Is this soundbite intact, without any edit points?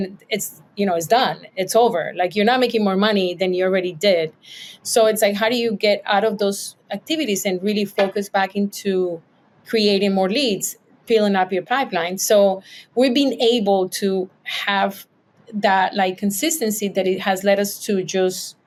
yes; 0 cuts

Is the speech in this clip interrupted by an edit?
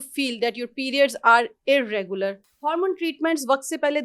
yes; 1 cut; at 2.5 s

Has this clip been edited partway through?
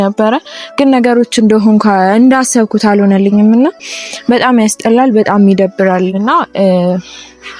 no; 0 cuts

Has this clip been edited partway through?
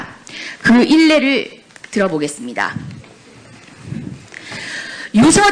yes; 1 cut; at 4.0 s

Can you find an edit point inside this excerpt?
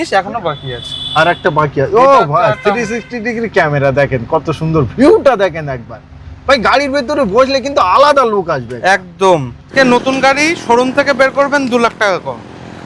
yes; 1 cut; at 9.7 s

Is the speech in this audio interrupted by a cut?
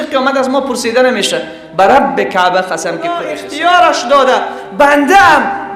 yes; 1 cut; at 3.4 s

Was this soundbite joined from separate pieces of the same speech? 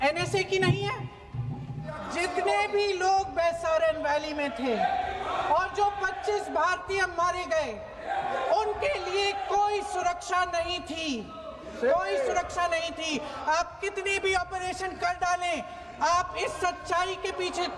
yes; 1 cut; at 2.0 s

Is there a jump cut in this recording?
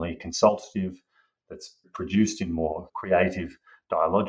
yes; 2 cuts; at 1.9 s, 2.9 s

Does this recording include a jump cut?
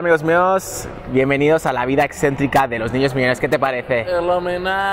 no; 0 cuts

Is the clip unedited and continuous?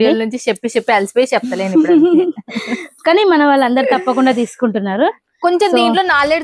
yes; 0 cuts

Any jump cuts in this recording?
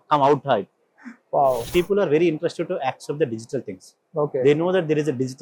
yes; 1 cut; at 1.6 s

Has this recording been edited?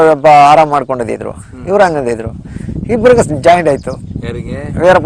no; 0 cuts

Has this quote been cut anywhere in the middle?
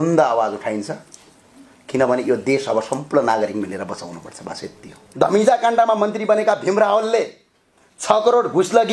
yes; 1 cut; at 5.0 s

